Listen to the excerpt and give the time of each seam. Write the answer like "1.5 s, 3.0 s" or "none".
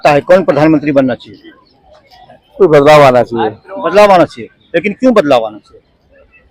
none